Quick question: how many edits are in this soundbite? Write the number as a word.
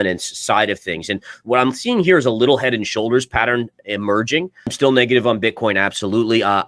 one